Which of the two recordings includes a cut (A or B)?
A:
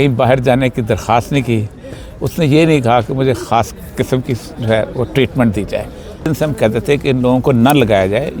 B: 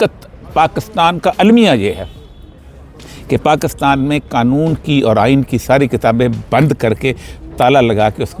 A